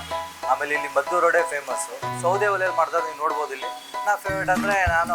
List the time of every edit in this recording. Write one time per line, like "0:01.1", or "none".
0:02.1
0:03.9